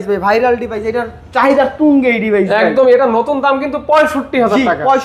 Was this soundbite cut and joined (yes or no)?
no